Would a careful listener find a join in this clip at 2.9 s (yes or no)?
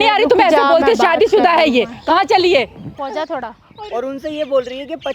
yes